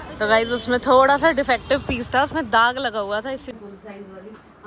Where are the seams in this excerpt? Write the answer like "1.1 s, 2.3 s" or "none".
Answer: 3.5 s